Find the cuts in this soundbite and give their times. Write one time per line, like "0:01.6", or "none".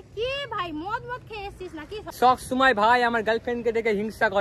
0:02.1